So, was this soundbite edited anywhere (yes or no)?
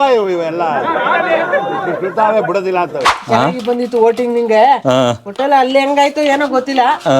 yes